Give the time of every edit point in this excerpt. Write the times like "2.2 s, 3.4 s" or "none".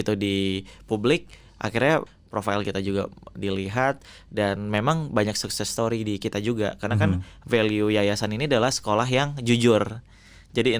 2.1 s